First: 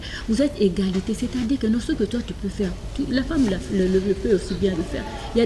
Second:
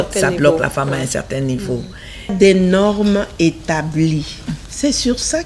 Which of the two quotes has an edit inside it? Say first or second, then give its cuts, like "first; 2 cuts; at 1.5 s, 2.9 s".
second; 1 cut; at 2.3 s